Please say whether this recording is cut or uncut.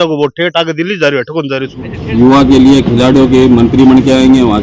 cut